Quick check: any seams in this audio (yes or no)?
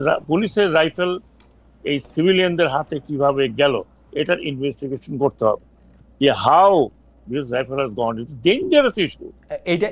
no